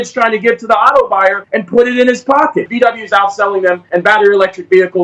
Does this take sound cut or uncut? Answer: cut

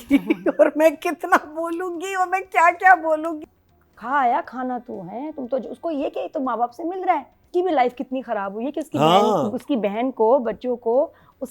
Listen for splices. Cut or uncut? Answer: cut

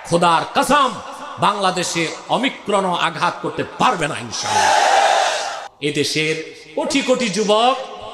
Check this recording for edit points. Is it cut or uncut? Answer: cut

